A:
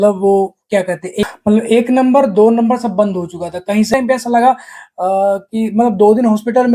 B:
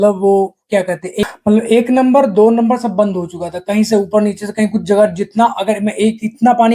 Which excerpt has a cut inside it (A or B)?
A